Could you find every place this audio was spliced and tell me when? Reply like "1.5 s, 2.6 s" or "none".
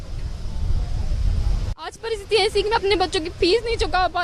2.0 s